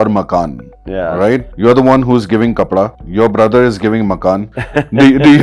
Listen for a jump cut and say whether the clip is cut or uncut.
cut